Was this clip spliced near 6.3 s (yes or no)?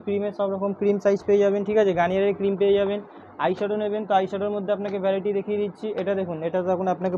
no